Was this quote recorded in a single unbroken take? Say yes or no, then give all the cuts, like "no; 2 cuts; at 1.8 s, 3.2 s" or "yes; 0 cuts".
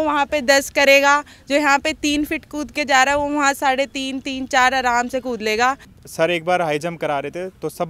no; 1 cut; at 5.9 s